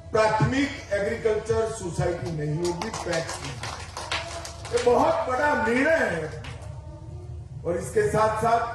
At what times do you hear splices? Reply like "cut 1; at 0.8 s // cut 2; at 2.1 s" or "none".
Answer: none